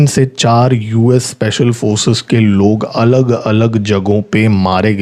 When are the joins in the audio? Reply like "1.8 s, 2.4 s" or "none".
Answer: none